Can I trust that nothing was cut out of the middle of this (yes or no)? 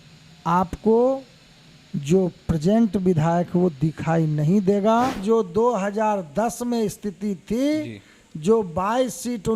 no